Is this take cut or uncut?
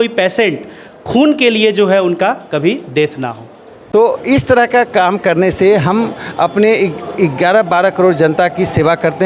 cut